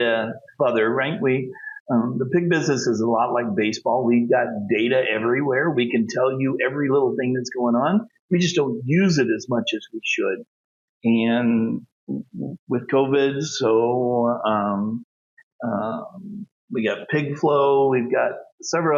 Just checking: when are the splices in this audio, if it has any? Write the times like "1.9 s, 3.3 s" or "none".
none